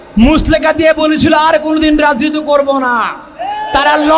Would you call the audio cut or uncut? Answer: uncut